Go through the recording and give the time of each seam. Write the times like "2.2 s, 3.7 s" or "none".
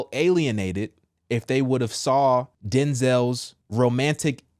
2.6 s, 3.5 s